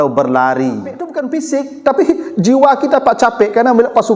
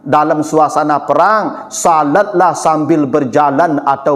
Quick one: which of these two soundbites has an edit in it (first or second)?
first